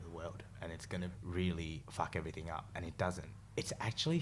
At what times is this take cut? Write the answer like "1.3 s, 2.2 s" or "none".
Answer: 1.2 s, 1.8 s, 3.3 s